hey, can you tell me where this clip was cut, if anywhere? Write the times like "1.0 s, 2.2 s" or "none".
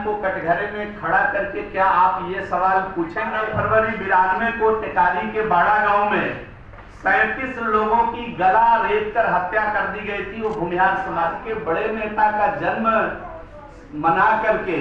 3.4 s, 11.4 s